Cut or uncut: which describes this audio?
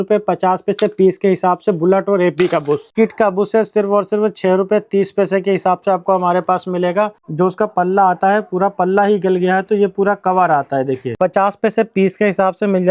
cut